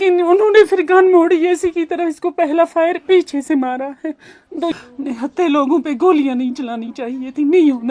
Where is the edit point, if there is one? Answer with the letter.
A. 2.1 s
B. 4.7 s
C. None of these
B